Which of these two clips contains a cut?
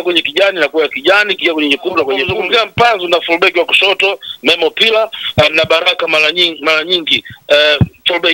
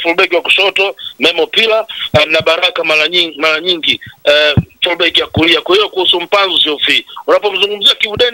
first; 1 cut; at 2.2 s

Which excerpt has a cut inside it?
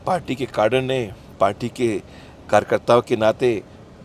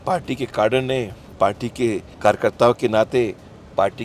second; 1 cut; at 2.1 s

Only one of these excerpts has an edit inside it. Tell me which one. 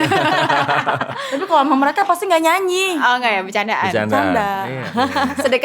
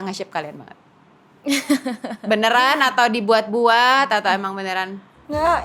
first; 2 cuts; at 1.2 s, 4.8 s

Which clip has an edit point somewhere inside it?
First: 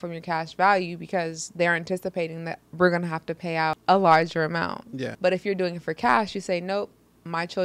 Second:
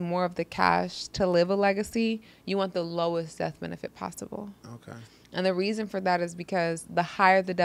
first; 2 cuts; at 3.8 s, 5.0 s

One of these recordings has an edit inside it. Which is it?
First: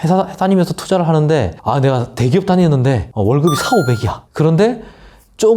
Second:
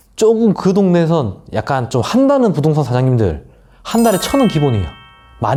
first; 3 cuts; at 1.6 s, 3.1 s, 4.2 s

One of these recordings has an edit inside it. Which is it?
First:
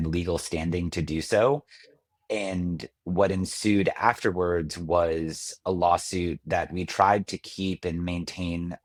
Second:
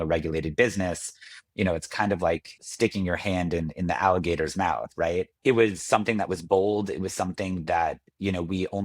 second; 2 cuts; at 2.6 s, 5.3 s

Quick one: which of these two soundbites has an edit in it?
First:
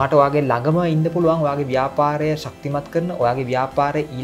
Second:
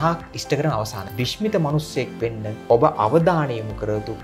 second; 2 cuts; at 1.0 s, 2.5 s

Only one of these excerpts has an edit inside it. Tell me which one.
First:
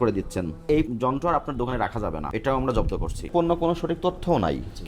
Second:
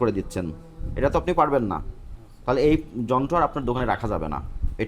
first; 3 cuts; at 0.8 s, 2.3 s, 3.3 s

